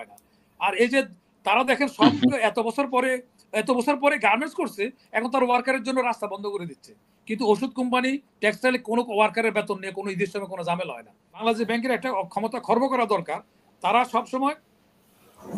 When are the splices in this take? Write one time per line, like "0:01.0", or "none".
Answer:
0:11.4